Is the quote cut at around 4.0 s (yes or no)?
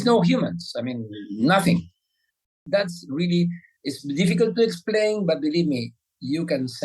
no